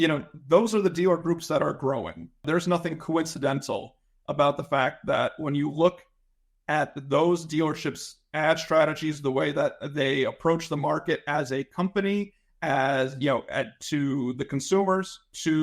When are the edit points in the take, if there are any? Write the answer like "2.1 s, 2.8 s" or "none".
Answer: 2.4 s